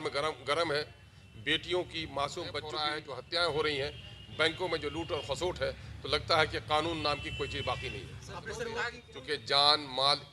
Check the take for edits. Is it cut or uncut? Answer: cut